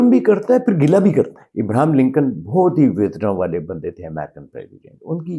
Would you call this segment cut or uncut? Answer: cut